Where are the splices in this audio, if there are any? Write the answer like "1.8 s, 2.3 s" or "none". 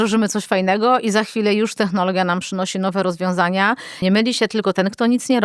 3.9 s